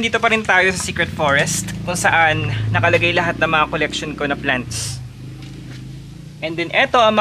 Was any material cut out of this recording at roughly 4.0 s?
no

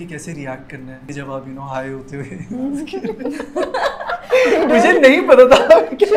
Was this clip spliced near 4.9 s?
no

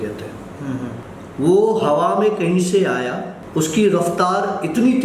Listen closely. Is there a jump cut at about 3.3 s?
yes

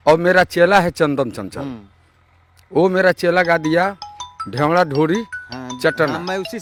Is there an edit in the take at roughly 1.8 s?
no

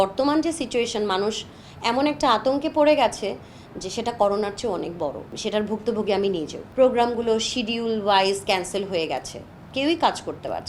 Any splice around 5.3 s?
yes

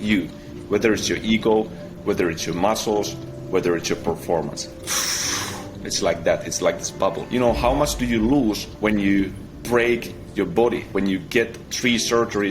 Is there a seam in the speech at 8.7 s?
yes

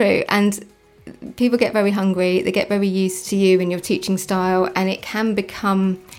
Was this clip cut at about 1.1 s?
no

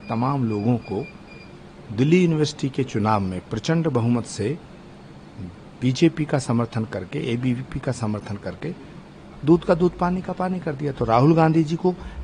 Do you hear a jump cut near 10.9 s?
no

